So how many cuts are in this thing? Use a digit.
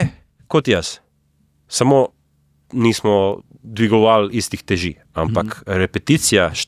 0